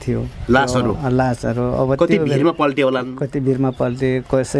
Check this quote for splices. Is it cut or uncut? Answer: uncut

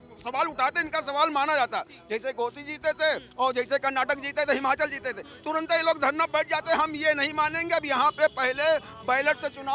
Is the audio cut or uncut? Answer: uncut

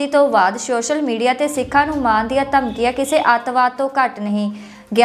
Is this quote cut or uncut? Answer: uncut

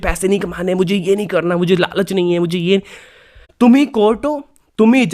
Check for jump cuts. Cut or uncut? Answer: cut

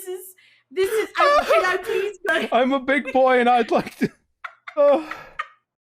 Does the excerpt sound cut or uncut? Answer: cut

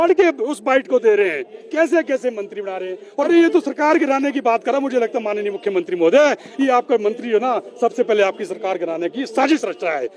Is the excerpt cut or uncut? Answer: cut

